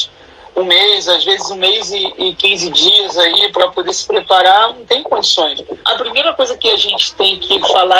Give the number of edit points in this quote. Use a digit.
1